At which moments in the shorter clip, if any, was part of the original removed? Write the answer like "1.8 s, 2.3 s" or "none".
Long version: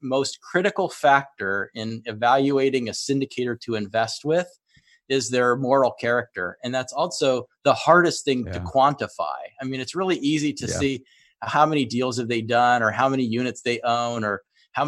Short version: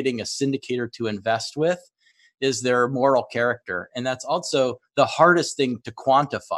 none

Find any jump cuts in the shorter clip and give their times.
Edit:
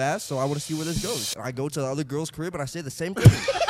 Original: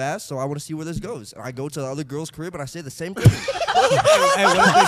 none

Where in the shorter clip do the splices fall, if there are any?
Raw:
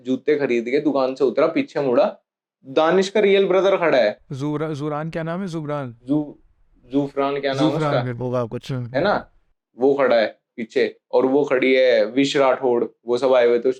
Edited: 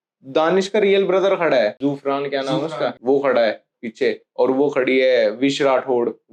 1.8 s, 3.0 s

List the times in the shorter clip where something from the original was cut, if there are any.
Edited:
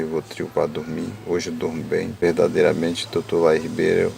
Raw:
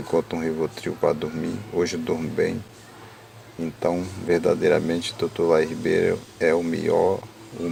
2.1 s

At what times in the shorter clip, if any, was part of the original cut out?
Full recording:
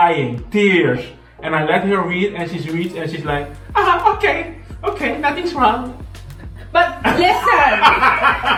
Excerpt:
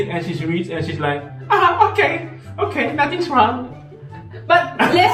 none

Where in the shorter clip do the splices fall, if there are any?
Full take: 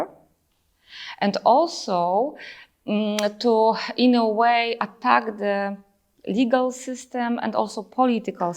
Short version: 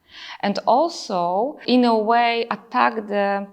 1.6 s

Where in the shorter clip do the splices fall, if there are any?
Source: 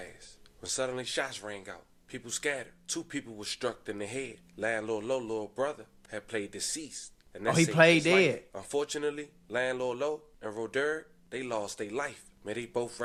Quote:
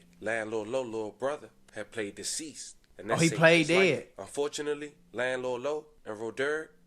none

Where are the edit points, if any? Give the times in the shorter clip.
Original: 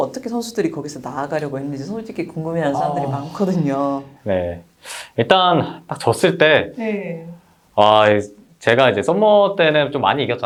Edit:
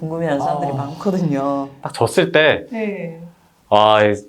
1.8 s

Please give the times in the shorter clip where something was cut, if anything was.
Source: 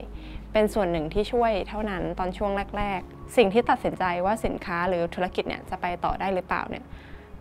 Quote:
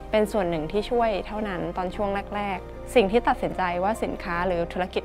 none

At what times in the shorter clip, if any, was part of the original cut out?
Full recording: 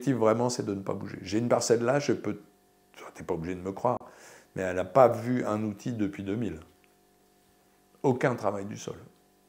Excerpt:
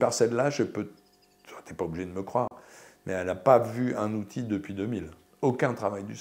5.2 s

